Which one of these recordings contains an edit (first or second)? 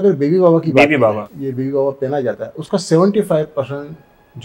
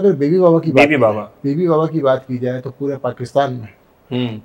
first